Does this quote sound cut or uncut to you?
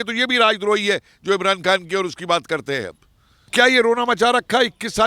cut